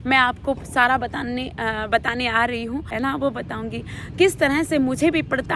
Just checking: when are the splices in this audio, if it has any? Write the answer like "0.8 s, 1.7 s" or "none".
2.9 s